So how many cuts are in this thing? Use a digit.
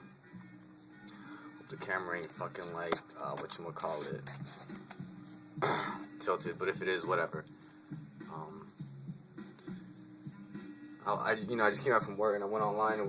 1